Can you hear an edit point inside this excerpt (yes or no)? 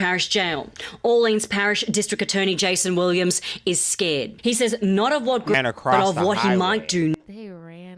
yes